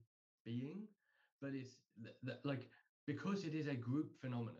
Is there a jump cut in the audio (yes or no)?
no